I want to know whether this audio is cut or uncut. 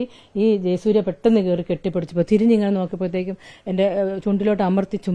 uncut